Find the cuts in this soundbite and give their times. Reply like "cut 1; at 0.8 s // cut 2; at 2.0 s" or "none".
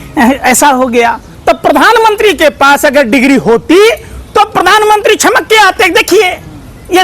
cut 1; at 1.3 s